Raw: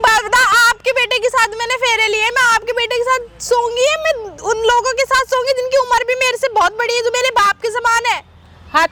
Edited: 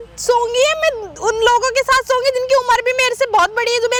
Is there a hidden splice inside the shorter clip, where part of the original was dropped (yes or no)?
no